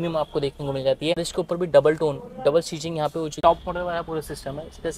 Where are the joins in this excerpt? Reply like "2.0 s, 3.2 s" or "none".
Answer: 1.2 s, 3.3 s